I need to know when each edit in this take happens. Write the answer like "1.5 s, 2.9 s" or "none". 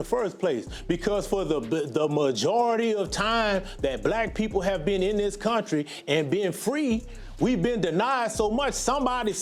none